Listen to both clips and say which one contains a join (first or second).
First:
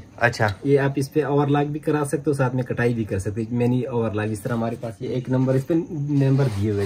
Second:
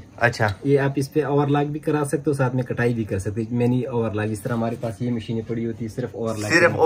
first